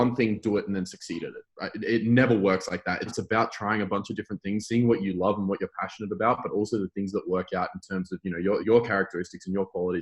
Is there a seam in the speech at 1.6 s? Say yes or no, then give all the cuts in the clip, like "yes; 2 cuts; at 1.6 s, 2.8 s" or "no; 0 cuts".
no; 2 cuts; at 3.0 s, 8.6 s